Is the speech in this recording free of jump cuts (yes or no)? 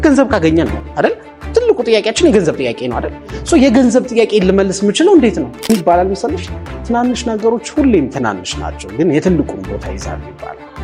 no